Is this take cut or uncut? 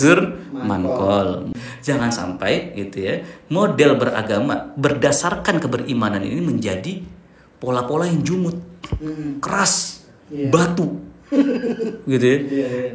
cut